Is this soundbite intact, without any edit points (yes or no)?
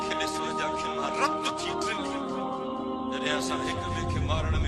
yes